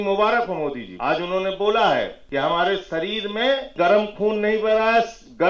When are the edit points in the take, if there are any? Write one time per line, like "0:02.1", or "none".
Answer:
0:00.9
0:02.2
0:03.7